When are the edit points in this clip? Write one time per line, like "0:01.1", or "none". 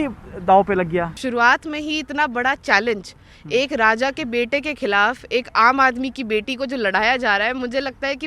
0:01.2